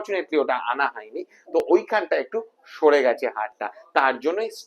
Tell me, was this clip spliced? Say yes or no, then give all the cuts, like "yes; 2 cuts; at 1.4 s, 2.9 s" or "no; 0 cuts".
no; 0 cuts